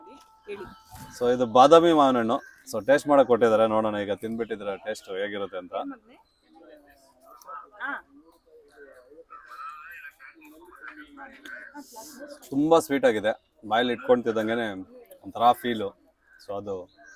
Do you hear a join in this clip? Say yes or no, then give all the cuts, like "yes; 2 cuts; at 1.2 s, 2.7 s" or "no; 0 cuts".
no; 0 cuts